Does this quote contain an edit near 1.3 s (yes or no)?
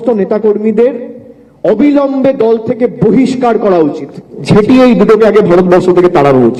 no